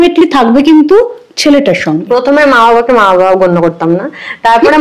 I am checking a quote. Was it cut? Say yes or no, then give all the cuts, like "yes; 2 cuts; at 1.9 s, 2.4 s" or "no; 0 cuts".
yes; 1 cut; at 1.9 s